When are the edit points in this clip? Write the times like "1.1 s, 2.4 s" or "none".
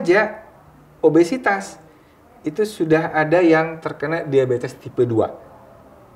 none